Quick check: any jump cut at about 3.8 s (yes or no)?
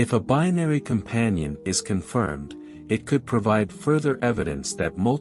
no